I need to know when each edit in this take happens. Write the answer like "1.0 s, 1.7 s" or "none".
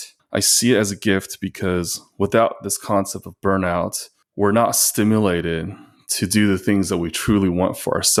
none

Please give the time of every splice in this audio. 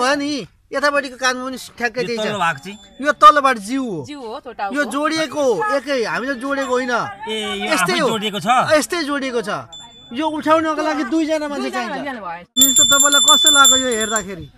12.6 s

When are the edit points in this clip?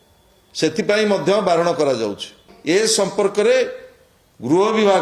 2.5 s

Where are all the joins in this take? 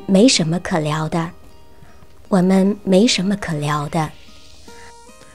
none

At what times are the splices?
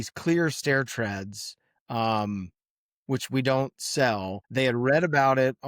4.4 s

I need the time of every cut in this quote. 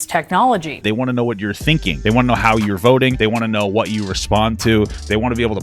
0.8 s, 1.9 s, 3.2 s

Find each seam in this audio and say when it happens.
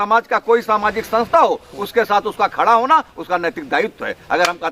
none

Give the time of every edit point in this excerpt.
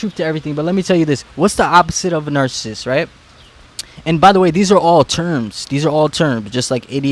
none

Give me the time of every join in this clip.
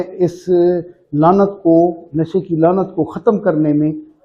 none

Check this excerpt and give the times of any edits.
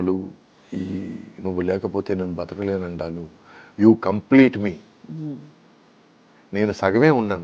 none

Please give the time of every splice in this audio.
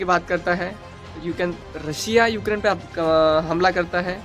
1.6 s

